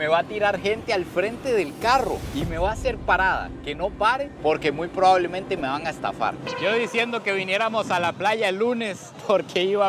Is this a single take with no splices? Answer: no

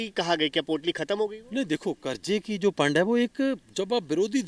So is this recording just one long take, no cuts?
yes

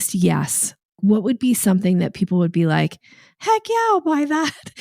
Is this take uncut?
yes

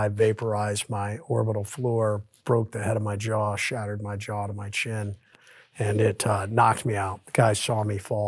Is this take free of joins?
yes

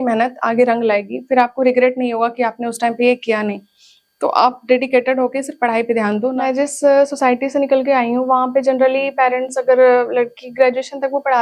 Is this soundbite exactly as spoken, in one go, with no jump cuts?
no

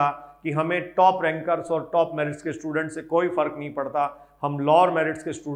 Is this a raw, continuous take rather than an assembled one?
yes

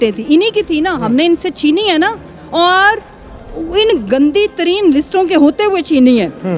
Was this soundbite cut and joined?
no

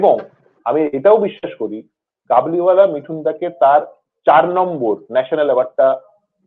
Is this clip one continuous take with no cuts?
yes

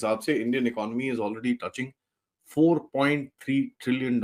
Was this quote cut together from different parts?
no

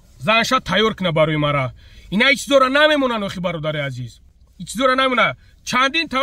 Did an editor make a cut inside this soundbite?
no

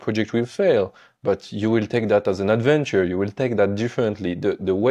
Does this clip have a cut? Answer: no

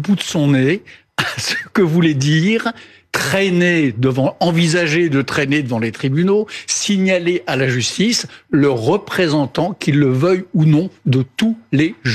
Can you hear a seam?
no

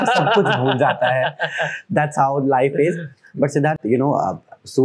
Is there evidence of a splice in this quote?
no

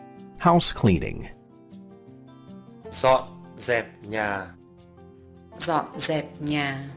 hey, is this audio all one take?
no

